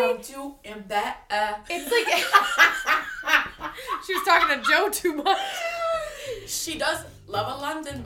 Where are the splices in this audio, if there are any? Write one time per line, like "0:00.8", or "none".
0:07.1